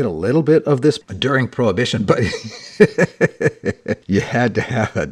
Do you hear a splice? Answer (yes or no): yes